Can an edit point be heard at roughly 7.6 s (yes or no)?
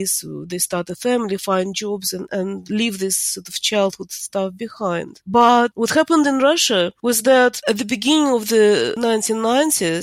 yes